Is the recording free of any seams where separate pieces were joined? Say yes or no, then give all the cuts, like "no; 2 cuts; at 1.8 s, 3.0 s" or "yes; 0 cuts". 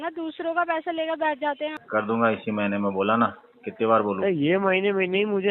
no; 1 cut; at 1.7 s